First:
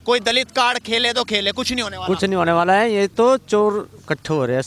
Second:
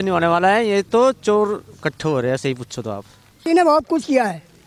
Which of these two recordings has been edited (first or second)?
second